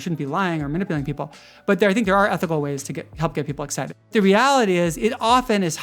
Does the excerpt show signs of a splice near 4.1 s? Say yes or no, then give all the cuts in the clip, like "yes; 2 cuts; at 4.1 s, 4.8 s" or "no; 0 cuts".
yes; 1 cut; at 4.1 s